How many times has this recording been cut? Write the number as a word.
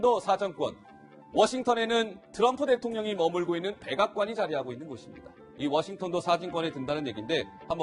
one